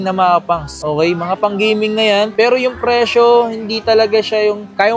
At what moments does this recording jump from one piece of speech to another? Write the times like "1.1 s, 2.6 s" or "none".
none